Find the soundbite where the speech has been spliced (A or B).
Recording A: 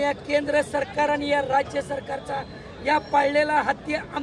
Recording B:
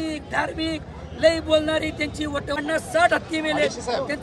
B